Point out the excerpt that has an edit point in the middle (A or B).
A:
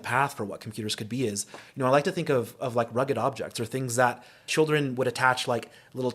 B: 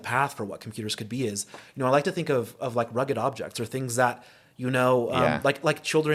A